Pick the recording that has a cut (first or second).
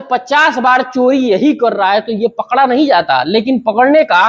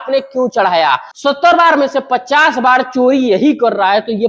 second